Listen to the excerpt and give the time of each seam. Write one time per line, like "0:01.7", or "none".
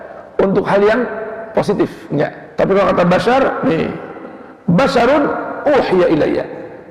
0:02.4